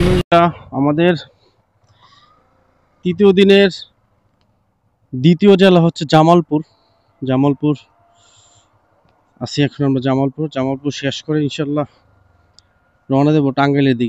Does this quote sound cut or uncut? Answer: uncut